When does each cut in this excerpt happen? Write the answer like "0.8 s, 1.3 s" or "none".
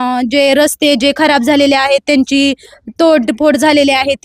none